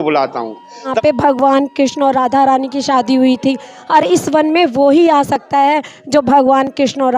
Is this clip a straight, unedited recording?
no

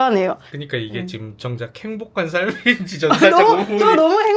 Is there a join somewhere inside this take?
no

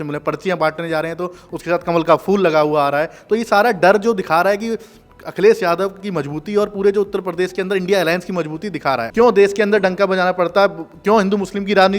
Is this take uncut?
no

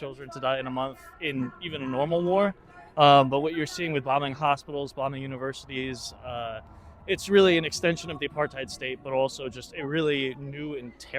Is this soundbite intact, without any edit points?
yes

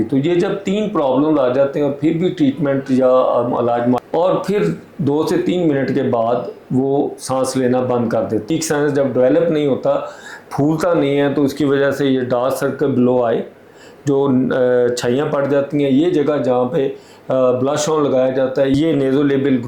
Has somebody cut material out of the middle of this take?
yes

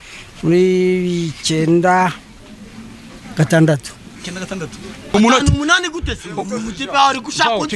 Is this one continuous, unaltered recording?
no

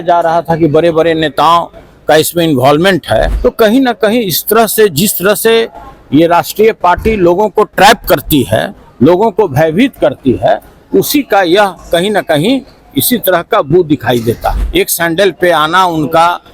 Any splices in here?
yes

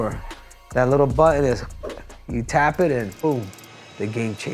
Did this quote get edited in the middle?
no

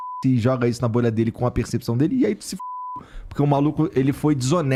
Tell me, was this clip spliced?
no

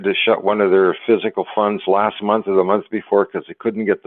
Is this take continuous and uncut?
yes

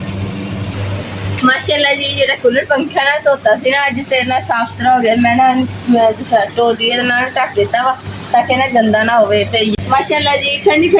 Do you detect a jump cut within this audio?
yes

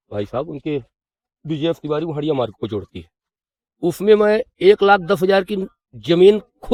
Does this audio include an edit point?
no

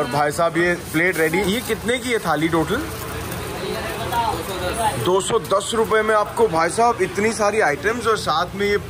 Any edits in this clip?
no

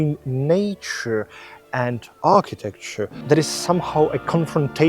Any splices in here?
yes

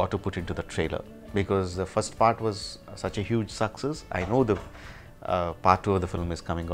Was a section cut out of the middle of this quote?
no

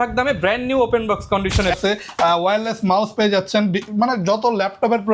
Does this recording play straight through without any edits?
no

